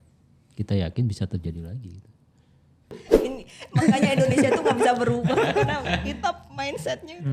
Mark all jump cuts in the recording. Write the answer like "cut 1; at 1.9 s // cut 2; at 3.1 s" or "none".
cut 1; at 3.0 s